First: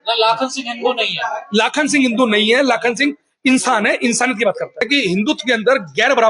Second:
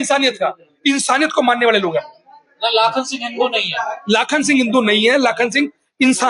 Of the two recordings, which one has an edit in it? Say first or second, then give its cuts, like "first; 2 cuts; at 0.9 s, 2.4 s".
first; 1 cut; at 4.9 s